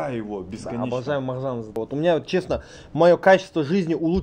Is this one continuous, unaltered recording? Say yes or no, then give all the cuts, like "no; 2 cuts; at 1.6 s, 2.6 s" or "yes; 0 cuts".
no; 1 cut; at 1.8 s